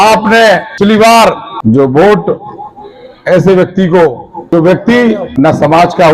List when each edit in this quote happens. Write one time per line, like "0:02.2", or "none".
0:00.8
0:01.5
0:04.5
0:05.3